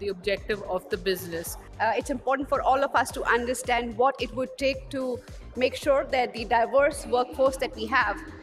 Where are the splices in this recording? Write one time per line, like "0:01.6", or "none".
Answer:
0:01.6